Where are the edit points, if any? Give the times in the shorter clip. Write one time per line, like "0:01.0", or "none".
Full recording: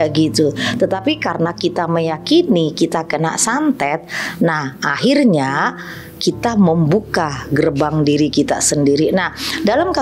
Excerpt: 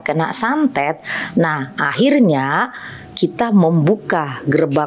none

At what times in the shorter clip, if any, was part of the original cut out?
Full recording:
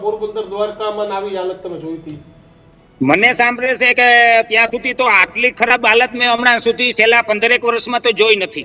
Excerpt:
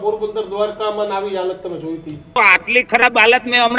0:02.4

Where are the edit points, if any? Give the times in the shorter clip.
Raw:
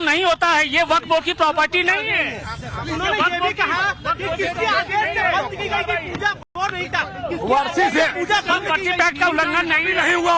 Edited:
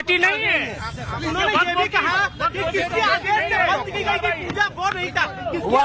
0:04.7

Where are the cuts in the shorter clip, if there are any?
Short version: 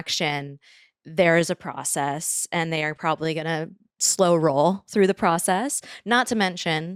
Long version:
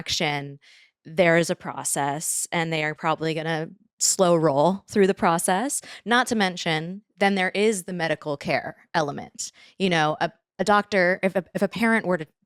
none

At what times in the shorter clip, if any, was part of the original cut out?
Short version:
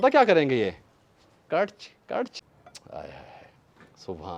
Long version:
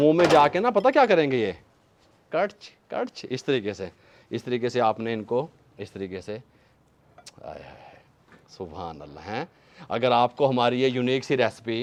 0:02.4

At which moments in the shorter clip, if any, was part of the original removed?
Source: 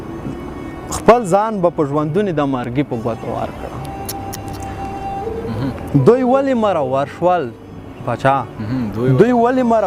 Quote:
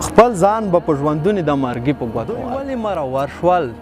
0:02.6

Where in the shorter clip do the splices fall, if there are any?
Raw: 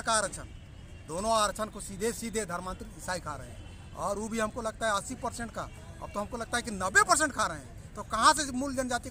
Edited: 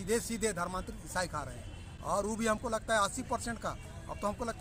none

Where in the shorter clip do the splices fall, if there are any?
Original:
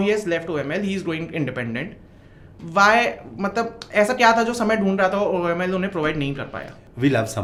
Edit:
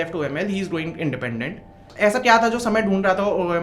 0:01.9

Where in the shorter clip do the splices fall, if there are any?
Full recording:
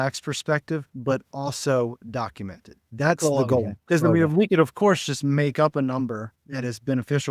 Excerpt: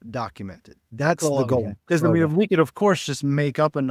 none

